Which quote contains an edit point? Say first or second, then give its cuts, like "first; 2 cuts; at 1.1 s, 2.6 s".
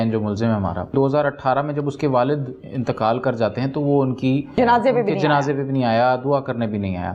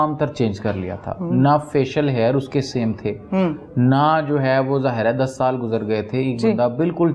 first; 2 cuts; at 0.9 s, 4.5 s